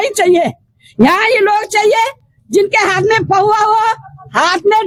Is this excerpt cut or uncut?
uncut